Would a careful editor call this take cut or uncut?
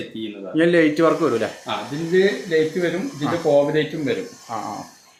uncut